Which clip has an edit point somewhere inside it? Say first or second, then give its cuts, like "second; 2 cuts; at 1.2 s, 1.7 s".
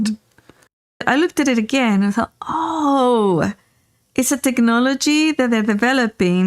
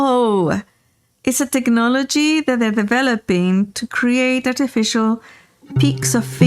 first; 1 cut; at 1.0 s